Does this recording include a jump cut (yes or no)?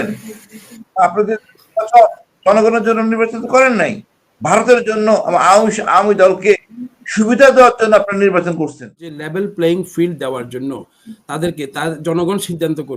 yes